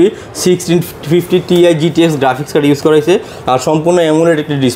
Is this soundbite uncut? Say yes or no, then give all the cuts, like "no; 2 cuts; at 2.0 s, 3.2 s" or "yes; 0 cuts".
yes; 0 cuts